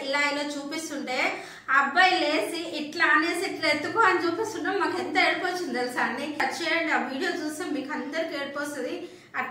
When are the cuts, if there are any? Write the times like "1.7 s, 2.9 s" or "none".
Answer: 6.4 s